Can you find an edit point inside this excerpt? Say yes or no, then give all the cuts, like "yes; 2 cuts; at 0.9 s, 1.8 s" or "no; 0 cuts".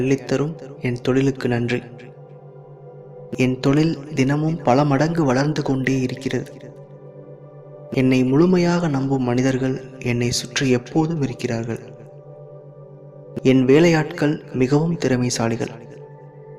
no; 0 cuts